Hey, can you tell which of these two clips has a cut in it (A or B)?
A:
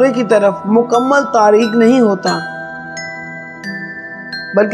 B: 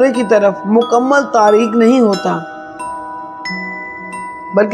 A